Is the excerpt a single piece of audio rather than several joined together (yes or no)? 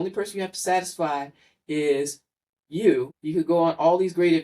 no